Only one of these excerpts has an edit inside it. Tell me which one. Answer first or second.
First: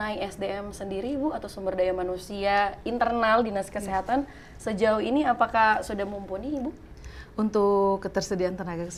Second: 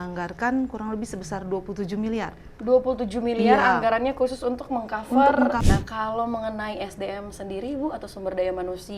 second